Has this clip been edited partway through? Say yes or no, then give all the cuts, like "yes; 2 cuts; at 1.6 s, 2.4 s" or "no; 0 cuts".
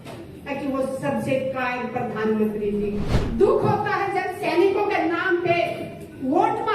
yes; 1 cut; at 3.2 s